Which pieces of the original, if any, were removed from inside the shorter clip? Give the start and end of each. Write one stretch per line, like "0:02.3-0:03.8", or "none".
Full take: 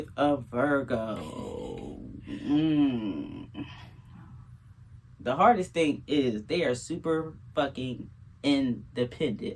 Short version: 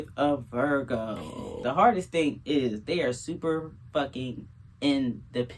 0:01.4-0:05.1